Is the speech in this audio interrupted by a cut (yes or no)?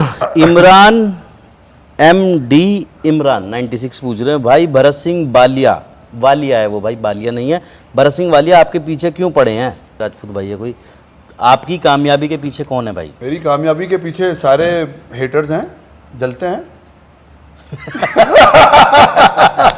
yes